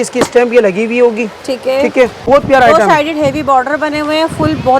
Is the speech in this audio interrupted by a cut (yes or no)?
yes